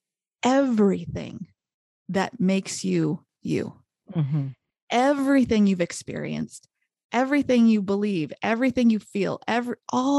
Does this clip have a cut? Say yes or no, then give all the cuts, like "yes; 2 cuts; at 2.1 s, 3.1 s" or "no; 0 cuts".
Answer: no; 0 cuts